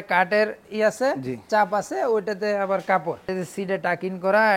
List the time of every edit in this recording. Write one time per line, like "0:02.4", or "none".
0:03.3